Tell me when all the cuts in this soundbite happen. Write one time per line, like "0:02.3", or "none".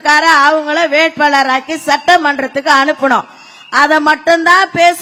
none